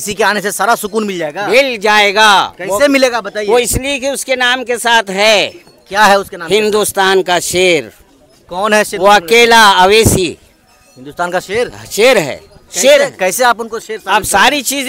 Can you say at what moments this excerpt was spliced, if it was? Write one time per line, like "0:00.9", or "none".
none